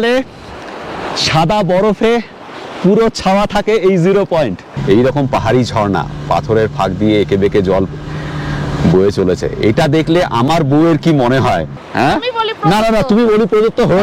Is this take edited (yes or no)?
yes